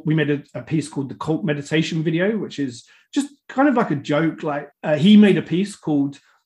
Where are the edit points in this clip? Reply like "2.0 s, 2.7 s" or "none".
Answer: 4.7 s